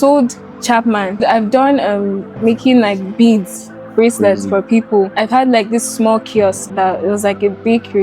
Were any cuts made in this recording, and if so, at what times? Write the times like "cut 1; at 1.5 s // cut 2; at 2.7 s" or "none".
cut 1; at 1.2 s // cut 2; at 5.1 s // cut 3; at 6.6 s